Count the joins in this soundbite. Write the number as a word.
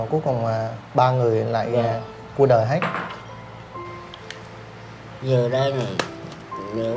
one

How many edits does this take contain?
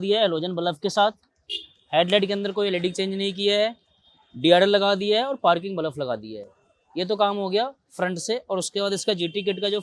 zero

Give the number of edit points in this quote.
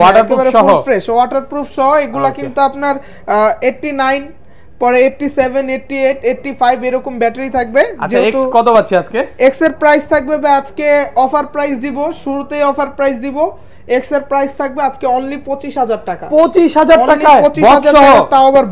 zero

